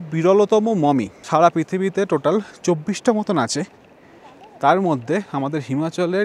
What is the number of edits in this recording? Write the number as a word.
one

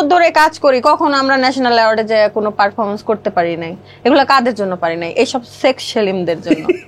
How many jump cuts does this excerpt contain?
zero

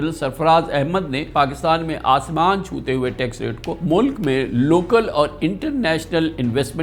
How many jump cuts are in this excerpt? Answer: two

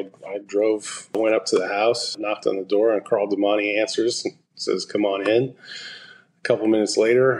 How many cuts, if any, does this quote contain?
two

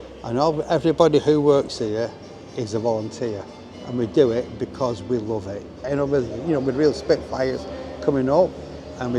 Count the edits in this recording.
one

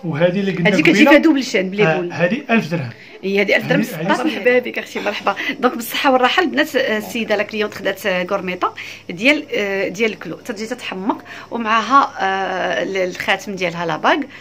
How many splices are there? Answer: one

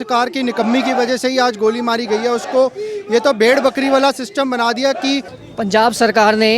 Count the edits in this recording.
one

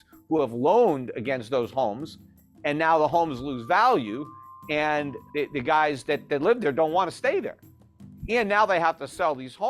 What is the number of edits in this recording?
one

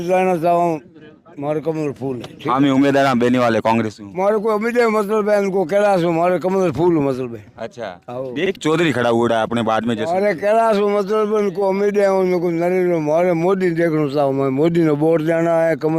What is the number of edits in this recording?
one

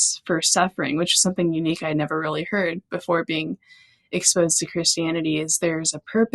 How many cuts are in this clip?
zero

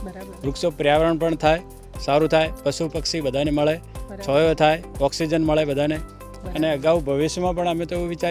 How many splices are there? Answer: one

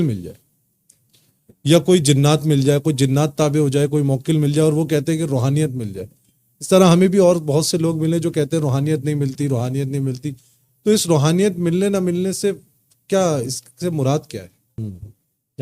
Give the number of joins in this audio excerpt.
one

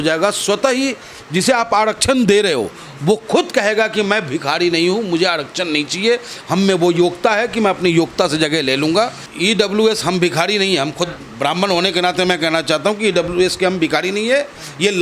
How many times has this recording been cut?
one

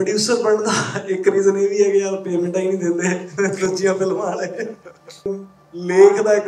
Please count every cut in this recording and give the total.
one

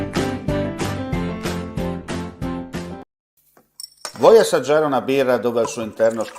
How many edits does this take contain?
one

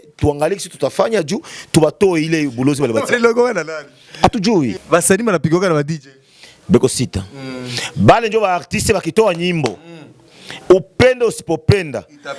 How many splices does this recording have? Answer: one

